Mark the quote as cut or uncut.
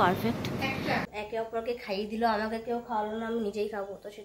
cut